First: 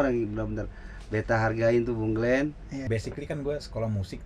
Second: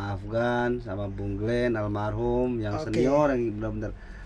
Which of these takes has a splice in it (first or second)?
first